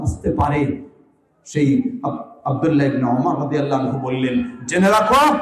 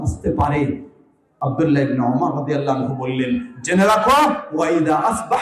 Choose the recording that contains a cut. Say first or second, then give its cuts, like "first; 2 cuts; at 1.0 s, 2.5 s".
second; 1 cut; at 1.3 s